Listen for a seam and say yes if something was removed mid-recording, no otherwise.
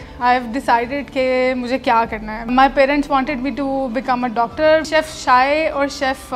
yes